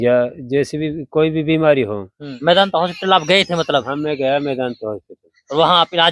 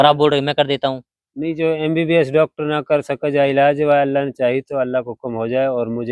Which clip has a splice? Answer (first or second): first